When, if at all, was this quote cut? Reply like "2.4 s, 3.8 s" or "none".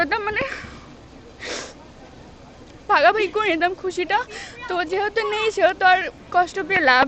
6.2 s